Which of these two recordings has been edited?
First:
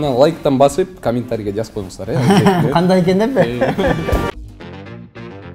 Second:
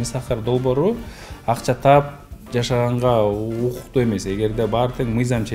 first; 1 cut; at 4.2 s

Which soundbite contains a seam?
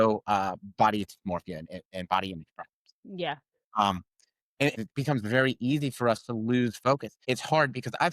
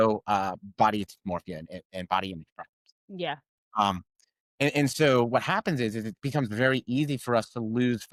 first; 2 cuts; at 4.7 s, 7.2 s

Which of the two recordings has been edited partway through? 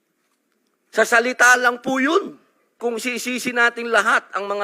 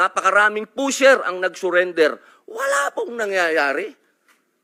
first; 1 cut; at 2.8 s

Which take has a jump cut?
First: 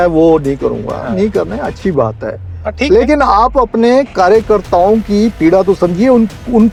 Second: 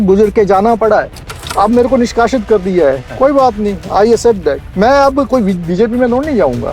second; 2 cuts; at 1.4 s, 4.7 s

